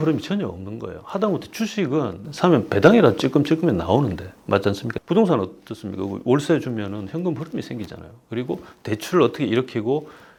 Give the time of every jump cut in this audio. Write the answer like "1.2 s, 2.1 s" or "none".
none